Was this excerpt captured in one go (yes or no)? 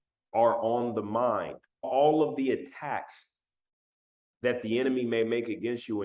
no